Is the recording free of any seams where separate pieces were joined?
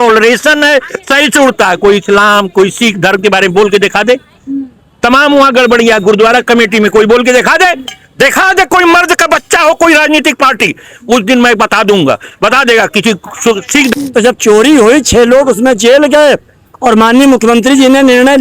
no; 1 cut; at 13.9 s

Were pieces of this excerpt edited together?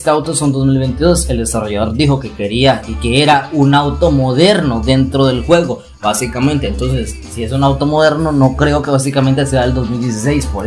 no; 0 cuts

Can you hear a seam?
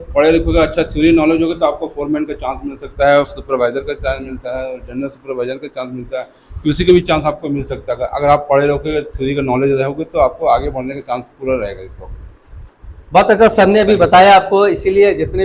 no; 0 cuts

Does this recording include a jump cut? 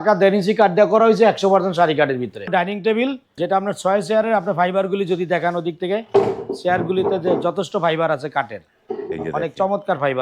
yes; 2 cuts; at 2.5 s, 3.3 s

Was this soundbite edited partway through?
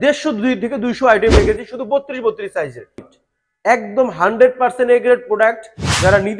yes; 1 cut; at 3.0 s

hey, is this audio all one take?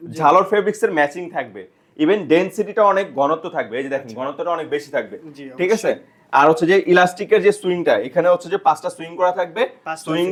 yes; 0 cuts

